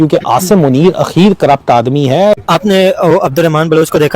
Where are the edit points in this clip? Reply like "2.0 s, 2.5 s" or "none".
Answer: 2.5 s